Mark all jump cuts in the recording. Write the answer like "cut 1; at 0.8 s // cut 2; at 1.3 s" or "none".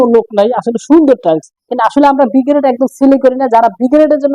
cut 1; at 1.7 s